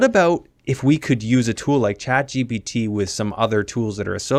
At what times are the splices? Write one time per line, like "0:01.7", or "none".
none